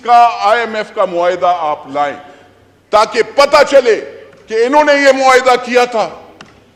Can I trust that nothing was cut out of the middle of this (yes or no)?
yes